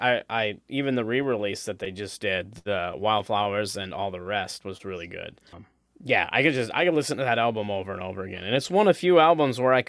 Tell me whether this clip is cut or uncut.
cut